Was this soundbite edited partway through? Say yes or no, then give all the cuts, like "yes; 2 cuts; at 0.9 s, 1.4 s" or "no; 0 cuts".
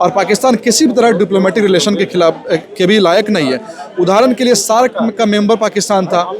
no; 0 cuts